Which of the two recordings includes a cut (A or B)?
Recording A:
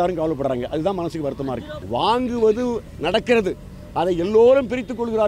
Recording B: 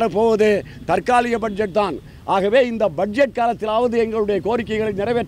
A